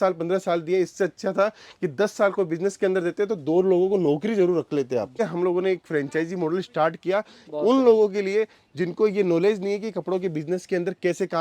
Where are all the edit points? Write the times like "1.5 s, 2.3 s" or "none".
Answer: 5.2 s

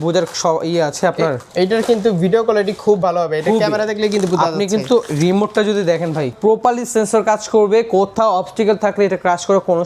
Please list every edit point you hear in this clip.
1.4 s, 6.4 s

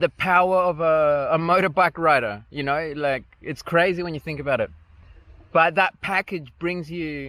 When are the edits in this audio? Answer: none

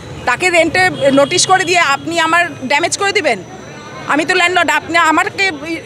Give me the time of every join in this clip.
none

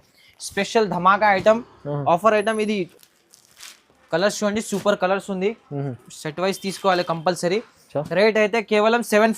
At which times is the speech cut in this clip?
2.9 s

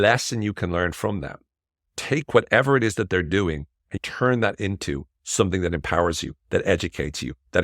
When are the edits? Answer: 1.9 s, 4.0 s

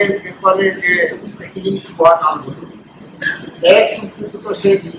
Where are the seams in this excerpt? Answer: none

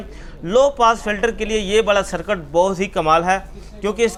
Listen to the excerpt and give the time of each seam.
none

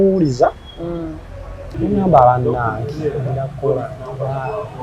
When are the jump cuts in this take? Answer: 1.6 s

